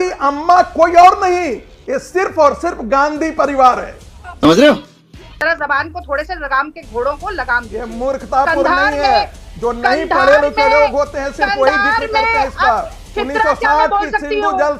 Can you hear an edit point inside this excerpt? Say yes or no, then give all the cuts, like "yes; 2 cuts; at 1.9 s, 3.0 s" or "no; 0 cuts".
no; 0 cuts